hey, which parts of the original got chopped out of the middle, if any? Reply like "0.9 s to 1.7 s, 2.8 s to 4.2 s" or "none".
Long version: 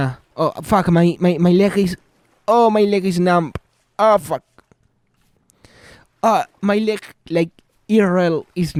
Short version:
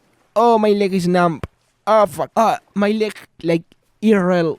4.4 s to 6.2 s